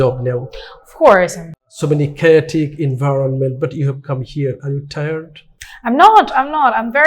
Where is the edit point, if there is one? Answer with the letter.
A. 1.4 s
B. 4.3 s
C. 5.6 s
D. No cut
A